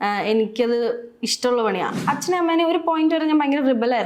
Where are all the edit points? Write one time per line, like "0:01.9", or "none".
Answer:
0:02.0